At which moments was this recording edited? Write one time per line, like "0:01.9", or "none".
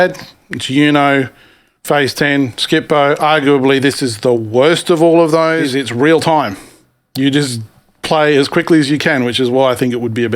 0:05.7